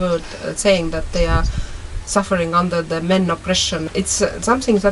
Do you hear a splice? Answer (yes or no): yes